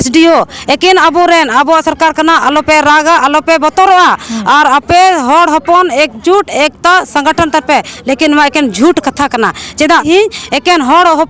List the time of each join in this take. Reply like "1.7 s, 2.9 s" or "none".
10.1 s

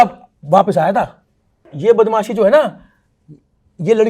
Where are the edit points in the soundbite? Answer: 1.6 s

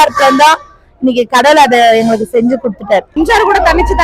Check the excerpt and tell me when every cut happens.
3.1 s

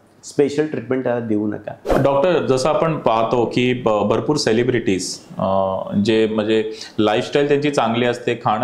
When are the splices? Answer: 1.9 s

